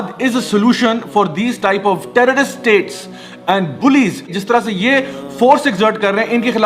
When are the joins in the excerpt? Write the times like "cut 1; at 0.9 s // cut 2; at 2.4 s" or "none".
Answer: cut 1; at 4.3 s